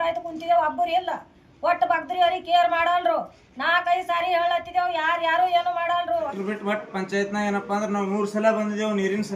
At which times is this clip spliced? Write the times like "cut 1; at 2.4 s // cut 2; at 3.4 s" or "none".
cut 1; at 6.3 s